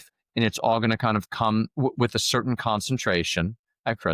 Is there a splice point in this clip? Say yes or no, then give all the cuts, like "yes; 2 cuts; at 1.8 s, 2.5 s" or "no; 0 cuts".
no; 0 cuts